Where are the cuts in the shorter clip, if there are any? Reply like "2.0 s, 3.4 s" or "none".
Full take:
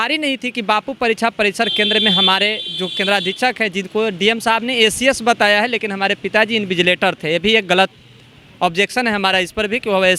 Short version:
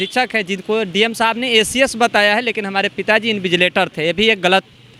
none